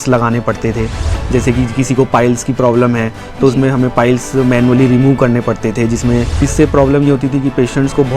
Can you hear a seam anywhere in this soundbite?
yes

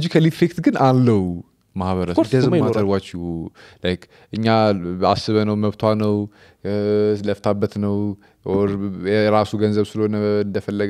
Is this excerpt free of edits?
yes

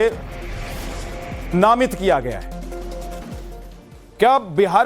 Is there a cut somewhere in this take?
yes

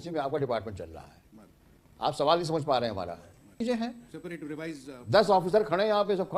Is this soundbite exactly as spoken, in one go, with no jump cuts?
no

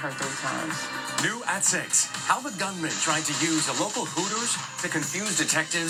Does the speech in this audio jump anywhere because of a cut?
no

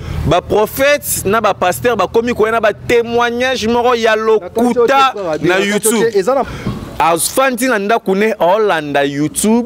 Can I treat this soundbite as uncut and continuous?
no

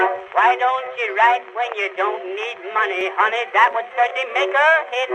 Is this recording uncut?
no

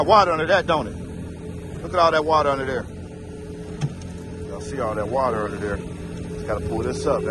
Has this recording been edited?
no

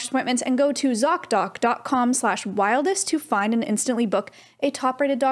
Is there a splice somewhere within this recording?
no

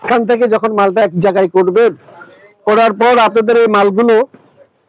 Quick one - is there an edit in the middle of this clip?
no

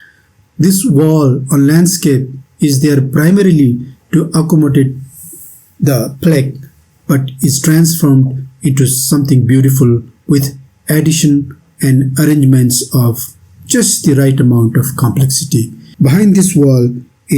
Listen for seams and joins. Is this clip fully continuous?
yes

